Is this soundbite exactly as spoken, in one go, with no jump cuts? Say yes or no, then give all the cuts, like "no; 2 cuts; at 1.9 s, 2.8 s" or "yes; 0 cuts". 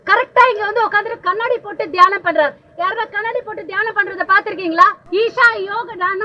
no; 1 cut; at 5.0 s